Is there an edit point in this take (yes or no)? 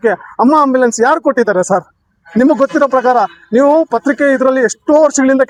no